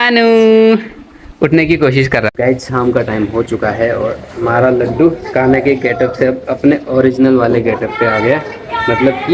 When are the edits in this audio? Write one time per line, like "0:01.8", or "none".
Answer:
0:02.3